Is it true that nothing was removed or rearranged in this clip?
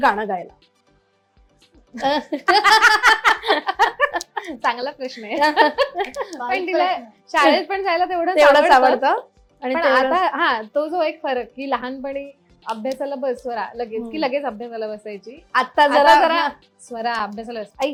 yes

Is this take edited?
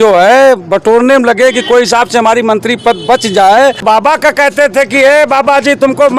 yes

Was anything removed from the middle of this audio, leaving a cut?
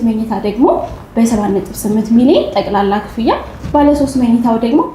no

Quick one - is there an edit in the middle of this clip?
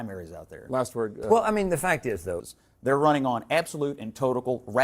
yes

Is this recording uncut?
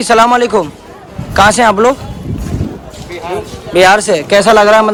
yes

